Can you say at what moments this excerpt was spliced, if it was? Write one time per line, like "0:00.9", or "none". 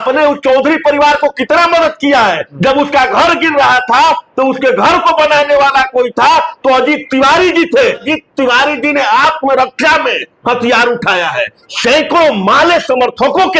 0:02.5
0:08.0
0:11.6